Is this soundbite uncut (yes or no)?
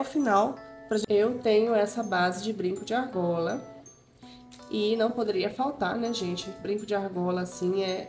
no